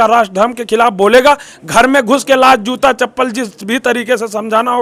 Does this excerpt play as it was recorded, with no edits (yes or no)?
yes